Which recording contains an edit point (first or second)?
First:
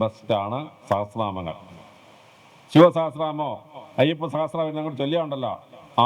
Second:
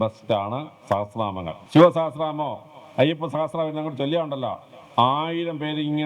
second